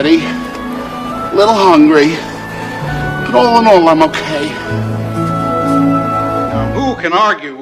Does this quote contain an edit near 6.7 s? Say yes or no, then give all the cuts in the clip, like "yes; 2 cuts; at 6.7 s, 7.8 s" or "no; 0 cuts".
yes; 1 cut; at 6.7 s